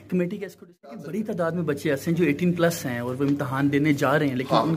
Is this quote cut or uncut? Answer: cut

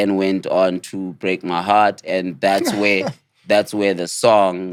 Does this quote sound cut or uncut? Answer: uncut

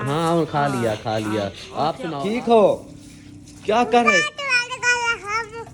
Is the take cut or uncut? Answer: cut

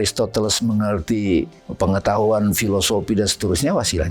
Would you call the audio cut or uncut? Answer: cut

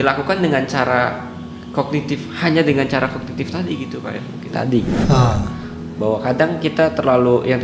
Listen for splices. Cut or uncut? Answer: cut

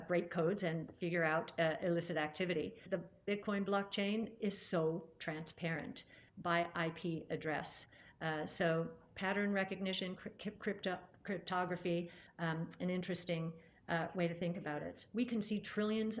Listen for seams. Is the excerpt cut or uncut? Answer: cut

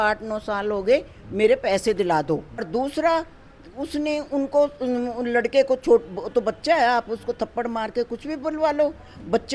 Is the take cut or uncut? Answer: cut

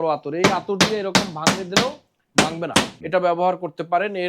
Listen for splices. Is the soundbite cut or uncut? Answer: cut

